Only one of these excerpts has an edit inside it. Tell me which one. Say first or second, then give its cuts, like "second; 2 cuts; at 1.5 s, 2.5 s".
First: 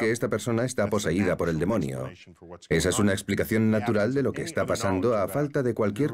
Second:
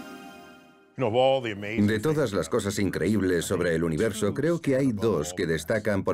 second; 1 cut; at 4.0 s